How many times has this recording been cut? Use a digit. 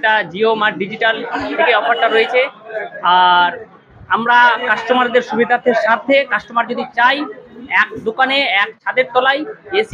0